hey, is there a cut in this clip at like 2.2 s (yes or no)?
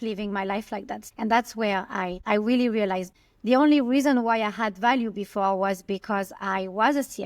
yes